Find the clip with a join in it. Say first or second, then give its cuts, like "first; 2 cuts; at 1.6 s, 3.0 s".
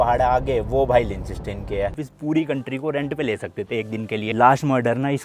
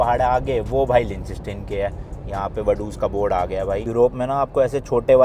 first; 2 cuts; at 2.1 s, 4.3 s